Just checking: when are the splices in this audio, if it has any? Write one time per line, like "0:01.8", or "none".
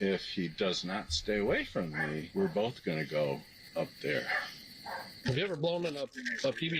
0:02.2
0:04.7